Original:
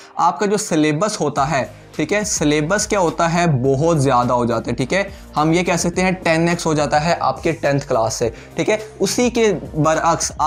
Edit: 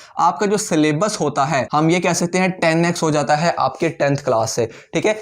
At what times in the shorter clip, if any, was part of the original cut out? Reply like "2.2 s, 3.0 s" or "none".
1.7 s